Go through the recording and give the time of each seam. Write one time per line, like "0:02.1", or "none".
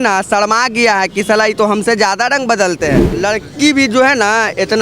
0:03.2